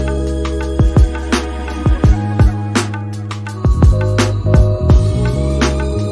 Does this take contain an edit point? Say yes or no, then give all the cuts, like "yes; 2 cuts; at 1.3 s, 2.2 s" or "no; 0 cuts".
no; 0 cuts